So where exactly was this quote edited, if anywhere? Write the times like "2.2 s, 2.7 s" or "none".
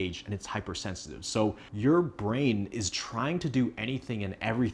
1.7 s

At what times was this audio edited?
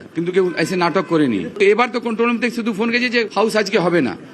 3.3 s

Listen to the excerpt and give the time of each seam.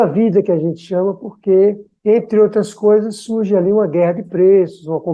none

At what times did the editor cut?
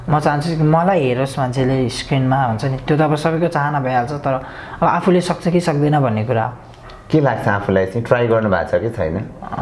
none

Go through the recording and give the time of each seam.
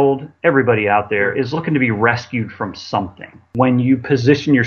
1.3 s, 3.5 s

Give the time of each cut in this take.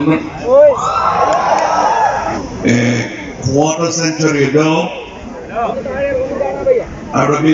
2.4 s

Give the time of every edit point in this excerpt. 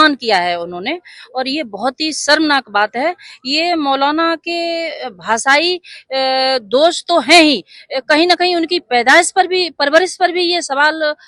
none

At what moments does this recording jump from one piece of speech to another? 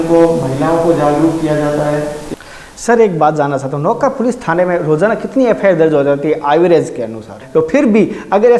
2.3 s, 7.4 s

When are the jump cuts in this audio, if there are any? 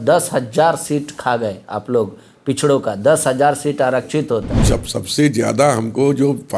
4.6 s

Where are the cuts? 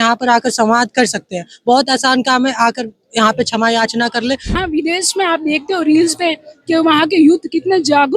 4.6 s

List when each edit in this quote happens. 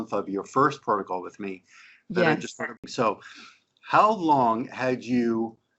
2.9 s

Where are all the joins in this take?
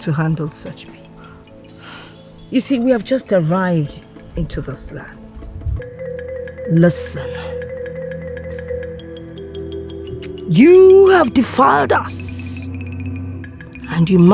5.8 s

